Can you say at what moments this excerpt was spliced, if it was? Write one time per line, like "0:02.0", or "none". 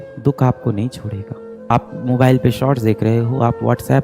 0:01.7